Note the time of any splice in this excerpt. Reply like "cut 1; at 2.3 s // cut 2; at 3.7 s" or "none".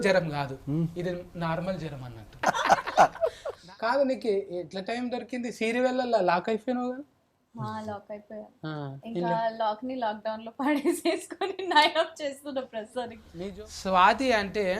cut 1; at 2.4 s // cut 2; at 3.6 s // cut 3; at 13.2 s

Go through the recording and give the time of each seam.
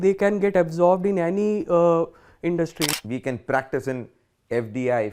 cut 1; at 2.9 s

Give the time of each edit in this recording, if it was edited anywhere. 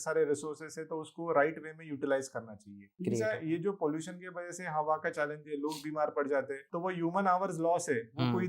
cut 1; at 2.8 s // cut 2; at 6.6 s

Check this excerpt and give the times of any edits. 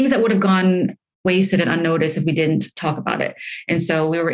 cut 1; at 1.2 s

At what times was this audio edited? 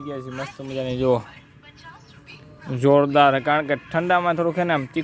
none

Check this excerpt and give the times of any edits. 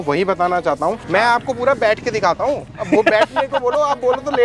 cut 1; at 1.0 s

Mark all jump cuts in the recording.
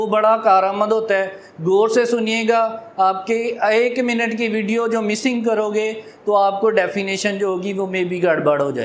none

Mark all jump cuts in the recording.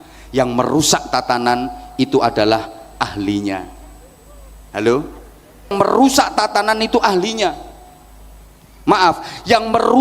cut 1; at 5.7 s

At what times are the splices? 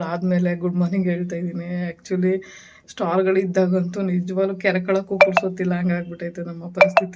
none

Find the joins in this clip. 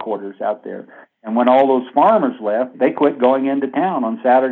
none

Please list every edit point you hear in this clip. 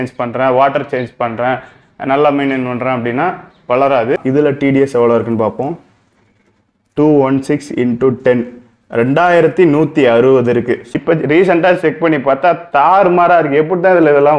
cut 1; at 4.2 s // cut 2; at 10.8 s

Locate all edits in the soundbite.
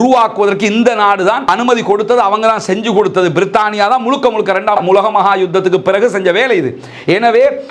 none

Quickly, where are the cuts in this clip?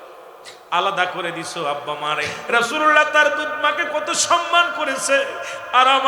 cut 1; at 2.4 s

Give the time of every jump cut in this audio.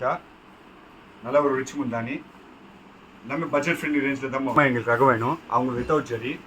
cut 1; at 4.6 s

